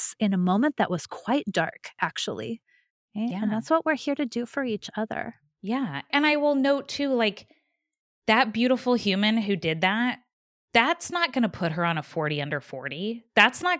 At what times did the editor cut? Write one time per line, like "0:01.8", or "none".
0:03.0